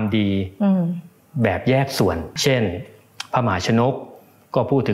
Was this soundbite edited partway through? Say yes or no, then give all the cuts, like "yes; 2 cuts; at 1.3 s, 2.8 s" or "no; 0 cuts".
yes; 1 cut; at 2.3 s